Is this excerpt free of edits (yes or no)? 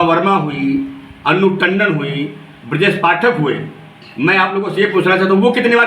yes